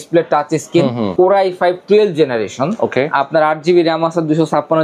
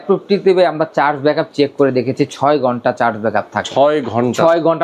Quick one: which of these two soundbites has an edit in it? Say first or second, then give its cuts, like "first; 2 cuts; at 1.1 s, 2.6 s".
first; 1 cut; at 1.1 s